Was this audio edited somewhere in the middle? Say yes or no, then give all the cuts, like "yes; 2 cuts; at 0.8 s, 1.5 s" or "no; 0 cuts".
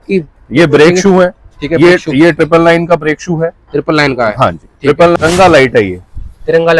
yes; 1 cut; at 5.2 s